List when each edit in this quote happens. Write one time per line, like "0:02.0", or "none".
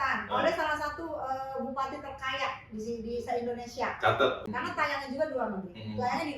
0:04.4